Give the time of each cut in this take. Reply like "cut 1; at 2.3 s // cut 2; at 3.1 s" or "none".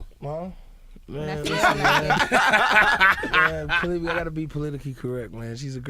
cut 1; at 3.3 s